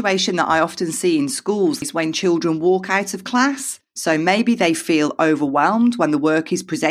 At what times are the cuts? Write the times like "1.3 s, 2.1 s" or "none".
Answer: 1.8 s